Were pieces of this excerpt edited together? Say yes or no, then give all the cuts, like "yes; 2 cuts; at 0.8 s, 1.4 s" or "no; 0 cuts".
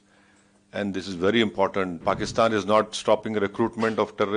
yes; 1 cut; at 1.9 s